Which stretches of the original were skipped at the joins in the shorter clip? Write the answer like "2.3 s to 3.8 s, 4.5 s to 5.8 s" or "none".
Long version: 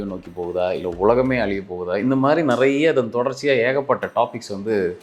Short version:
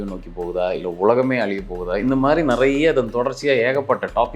none